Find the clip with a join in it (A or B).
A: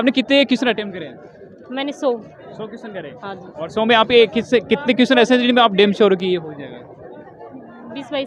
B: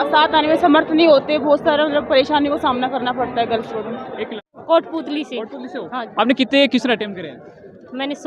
B